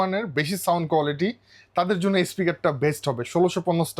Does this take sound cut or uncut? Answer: uncut